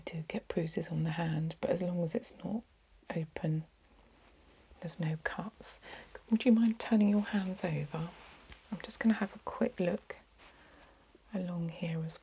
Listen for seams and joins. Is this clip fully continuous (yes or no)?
yes